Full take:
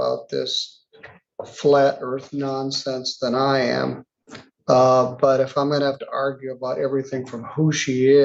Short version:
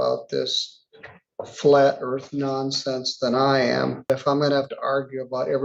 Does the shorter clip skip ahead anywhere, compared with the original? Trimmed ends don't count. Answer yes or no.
yes